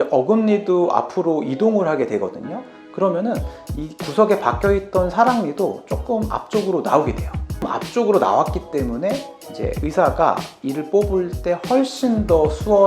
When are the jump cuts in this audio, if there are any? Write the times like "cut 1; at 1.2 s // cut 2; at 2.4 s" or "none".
cut 1; at 7.7 s